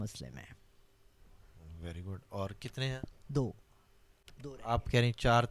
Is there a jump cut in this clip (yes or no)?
no